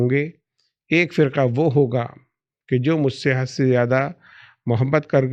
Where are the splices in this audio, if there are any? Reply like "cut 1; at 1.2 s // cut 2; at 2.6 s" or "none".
none